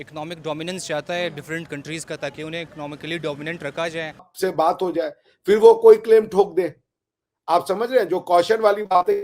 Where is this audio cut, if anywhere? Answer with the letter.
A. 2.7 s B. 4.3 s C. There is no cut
B